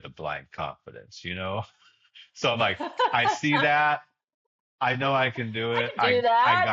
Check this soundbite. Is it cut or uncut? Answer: uncut